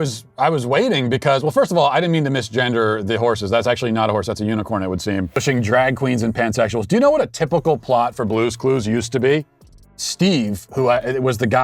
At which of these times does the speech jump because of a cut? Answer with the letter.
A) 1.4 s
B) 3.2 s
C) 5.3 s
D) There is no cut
C